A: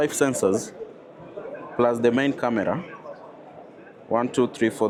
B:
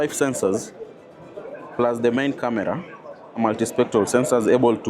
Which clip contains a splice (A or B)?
B